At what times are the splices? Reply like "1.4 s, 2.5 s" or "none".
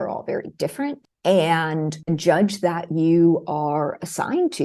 1.1 s, 2.0 s